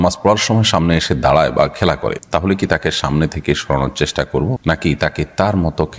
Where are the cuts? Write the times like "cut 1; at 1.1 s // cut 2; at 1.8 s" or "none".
none